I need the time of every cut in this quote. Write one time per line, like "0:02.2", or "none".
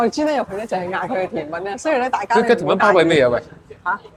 none